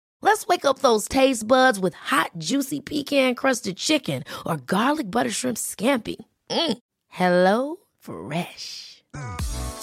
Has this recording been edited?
no; 0 cuts

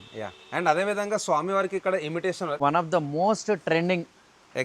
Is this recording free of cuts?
no; 1 cut; at 2.6 s

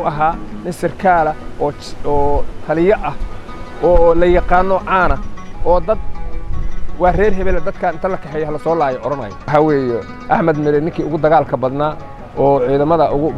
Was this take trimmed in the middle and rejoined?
yes; 1 cut; at 9.4 s

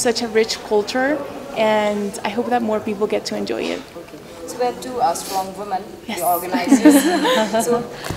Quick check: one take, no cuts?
yes; 0 cuts

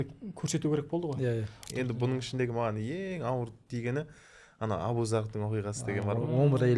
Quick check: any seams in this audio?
yes; 1 cut; at 1.7 s

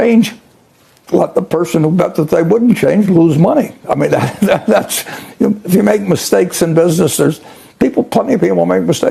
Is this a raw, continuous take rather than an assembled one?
yes; 0 cuts

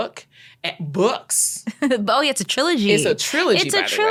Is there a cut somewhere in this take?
no; 0 cuts

